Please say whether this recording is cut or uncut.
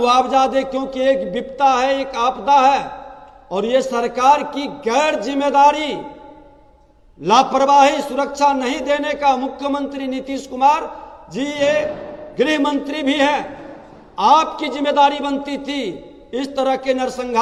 uncut